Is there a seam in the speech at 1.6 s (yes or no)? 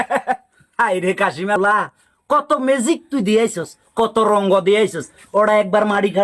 yes